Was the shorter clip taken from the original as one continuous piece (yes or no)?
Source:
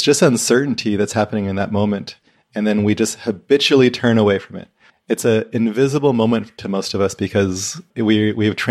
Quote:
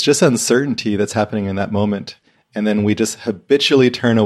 yes